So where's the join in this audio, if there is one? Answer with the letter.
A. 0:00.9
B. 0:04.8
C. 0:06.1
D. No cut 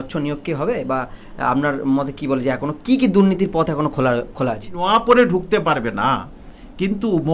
B